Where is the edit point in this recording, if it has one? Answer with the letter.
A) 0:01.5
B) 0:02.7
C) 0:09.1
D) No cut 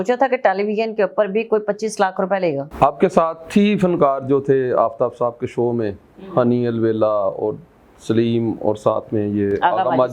B